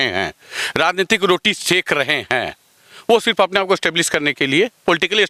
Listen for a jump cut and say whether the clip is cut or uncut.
uncut